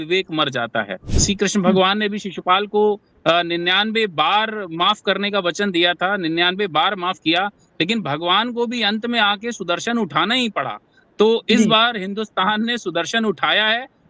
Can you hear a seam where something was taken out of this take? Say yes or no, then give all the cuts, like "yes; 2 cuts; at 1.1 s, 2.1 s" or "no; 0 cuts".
yes; 1 cut; at 1.1 s